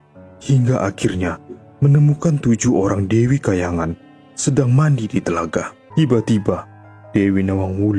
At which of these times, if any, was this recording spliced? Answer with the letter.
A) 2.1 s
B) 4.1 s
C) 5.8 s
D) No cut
C